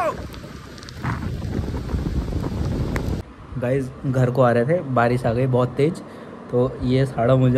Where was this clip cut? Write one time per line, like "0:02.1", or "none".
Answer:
0:03.2